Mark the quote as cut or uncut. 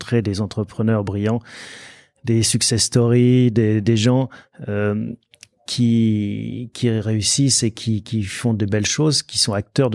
uncut